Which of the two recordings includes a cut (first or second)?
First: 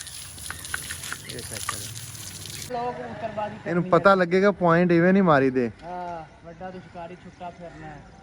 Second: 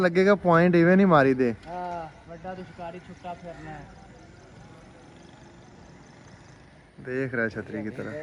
first